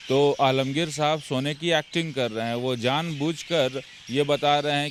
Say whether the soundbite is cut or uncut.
uncut